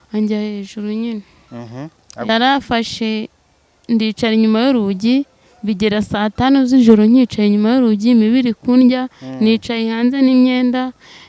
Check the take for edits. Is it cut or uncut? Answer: cut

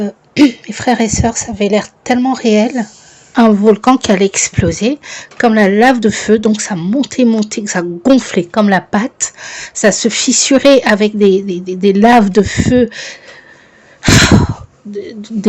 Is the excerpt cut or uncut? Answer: cut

